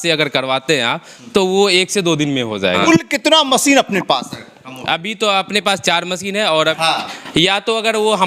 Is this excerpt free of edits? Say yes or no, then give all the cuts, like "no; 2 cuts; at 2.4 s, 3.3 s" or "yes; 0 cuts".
no; 2 cuts; at 2.8 s, 6.8 s